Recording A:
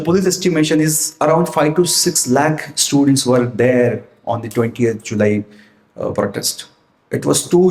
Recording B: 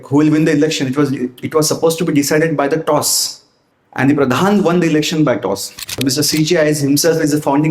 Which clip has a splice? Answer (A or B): B